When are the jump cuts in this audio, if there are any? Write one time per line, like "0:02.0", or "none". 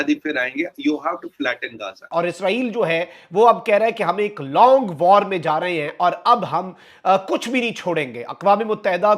0:01.9